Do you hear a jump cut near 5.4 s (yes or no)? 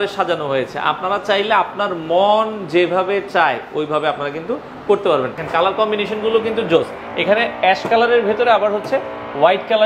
yes